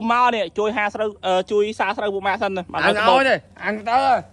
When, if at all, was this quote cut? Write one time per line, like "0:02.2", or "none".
none